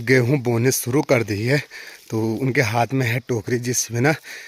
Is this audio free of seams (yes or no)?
yes